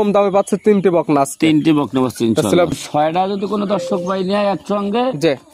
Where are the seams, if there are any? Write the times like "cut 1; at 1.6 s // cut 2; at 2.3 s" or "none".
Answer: cut 1; at 2.7 s